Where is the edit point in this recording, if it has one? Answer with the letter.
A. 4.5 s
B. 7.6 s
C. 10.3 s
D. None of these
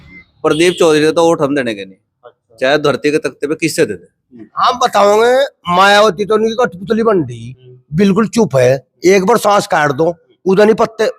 A